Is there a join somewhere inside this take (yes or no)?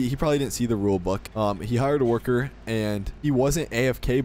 yes